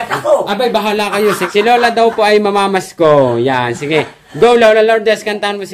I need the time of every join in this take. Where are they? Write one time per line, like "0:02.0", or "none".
0:01.4